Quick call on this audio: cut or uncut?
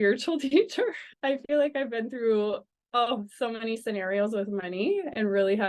cut